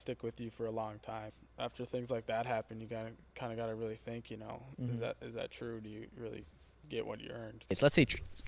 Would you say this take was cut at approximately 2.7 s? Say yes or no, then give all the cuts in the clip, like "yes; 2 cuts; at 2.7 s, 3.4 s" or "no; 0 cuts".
no; 2 cuts; at 1.4 s, 7.7 s